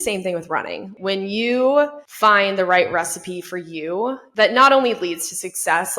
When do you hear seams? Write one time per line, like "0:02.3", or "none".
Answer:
0:00.9
0:02.0
0:04.2